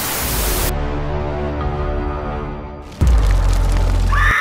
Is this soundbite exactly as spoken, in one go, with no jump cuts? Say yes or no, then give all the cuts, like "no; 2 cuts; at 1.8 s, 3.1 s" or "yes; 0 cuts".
yes; 0 cuts